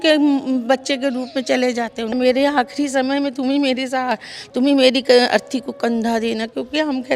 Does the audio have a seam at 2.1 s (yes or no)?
yes